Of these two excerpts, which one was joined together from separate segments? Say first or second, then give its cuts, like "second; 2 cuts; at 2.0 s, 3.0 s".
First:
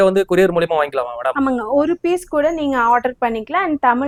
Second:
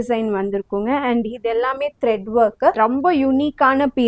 second; 1 cut; at 2.8 s